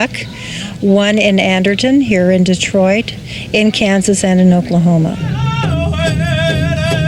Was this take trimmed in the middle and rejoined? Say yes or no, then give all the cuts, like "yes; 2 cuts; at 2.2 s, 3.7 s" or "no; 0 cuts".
no; 0 cuts